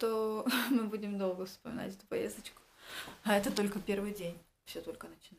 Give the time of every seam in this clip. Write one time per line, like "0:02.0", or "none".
none